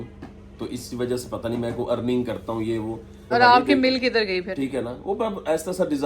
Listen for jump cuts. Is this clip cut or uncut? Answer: cut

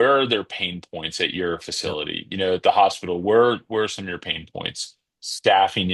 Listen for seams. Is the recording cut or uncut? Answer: uncut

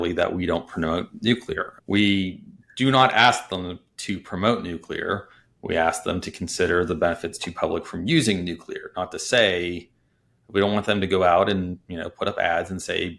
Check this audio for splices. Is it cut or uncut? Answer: uncut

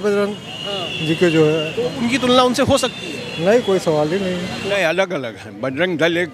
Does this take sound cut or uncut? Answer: cut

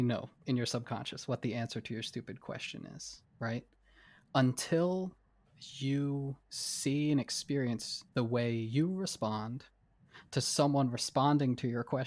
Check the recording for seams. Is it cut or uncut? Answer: uncut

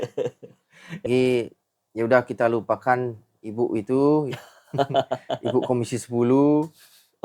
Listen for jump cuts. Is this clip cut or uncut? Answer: cut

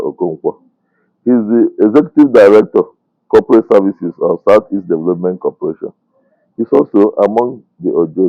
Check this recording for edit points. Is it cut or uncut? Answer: uncut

